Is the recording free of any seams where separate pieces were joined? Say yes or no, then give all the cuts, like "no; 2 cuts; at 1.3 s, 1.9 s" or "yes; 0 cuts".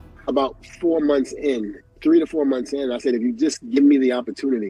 yes; 0 cuts